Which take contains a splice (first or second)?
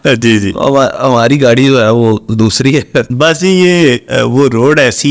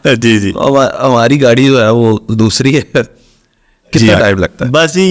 first